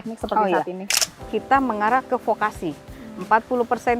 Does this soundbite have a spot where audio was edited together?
yes; 1 cut; at 0.9 s

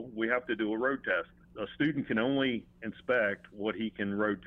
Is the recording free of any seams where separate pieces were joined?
no; 1 cut; at 1.4 s

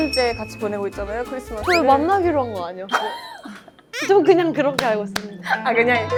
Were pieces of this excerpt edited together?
no; 0 cuts

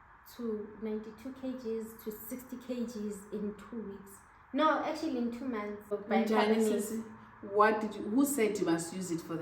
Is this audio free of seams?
no; 1 cut; at 6.0 s

